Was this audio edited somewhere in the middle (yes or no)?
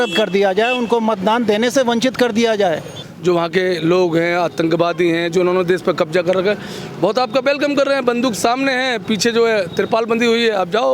yes